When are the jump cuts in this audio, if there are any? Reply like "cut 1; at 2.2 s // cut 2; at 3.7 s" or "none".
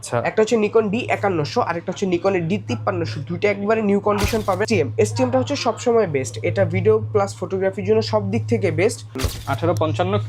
cut 1; at 4.6 s // cut 2; at 9.1 s